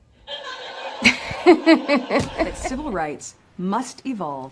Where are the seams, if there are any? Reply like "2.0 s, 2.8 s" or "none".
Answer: 2.6 s